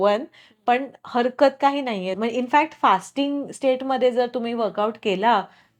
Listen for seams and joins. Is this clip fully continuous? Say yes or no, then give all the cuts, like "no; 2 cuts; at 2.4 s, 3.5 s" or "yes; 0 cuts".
no; 1 cut; at 2.1 s